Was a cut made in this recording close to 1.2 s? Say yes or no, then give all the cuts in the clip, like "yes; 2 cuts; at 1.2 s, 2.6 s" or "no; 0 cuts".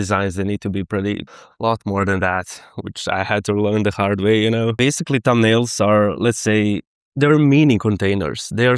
yes; 2 cuts; at 1.2 s, 4.8 s